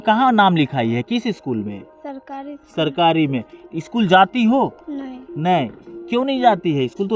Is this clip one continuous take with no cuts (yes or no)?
yes